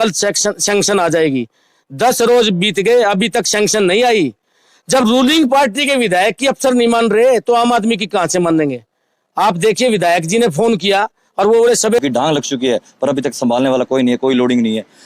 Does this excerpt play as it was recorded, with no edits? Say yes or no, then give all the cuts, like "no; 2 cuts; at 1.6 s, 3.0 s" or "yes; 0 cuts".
no; 1 cut; at 12.0 s